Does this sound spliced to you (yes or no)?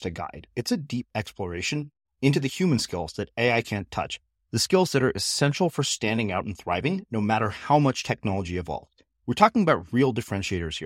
no